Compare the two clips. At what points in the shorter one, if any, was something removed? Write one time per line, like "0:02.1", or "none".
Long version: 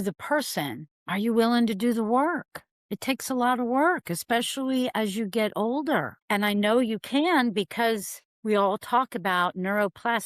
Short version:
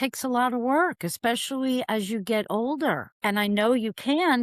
none